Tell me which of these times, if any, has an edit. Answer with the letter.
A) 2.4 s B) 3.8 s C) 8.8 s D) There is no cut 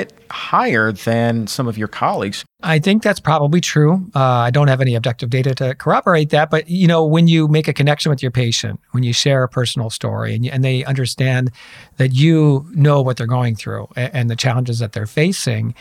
A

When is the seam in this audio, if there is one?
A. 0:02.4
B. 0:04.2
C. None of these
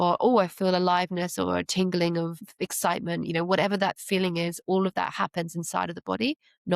A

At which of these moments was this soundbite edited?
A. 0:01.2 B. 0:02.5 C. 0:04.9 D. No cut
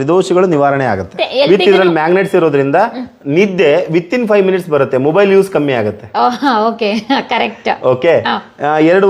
A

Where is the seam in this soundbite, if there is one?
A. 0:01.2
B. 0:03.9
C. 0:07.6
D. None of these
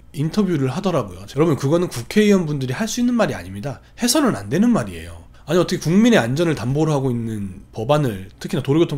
A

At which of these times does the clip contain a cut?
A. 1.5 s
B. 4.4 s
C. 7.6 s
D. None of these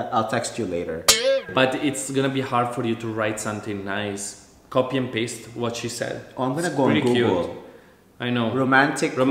A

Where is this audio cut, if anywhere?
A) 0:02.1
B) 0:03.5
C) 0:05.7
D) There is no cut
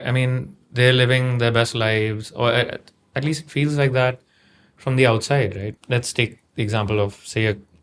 C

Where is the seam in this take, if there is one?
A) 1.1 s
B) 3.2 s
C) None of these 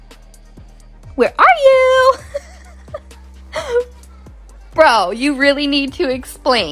A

